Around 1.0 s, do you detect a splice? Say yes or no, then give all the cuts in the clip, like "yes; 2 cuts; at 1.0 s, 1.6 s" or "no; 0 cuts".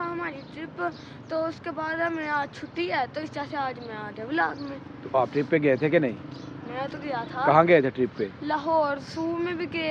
no; 0 cuts